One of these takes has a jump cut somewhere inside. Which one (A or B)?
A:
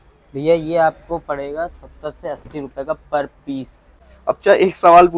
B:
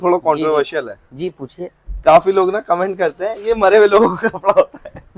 A